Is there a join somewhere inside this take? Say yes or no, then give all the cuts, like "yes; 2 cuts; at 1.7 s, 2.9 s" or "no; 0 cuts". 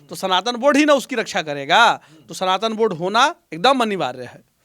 no; 0 cuts